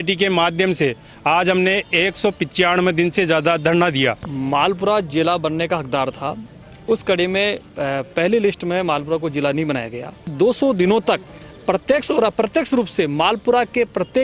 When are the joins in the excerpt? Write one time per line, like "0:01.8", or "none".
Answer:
0:04.3
0:10.2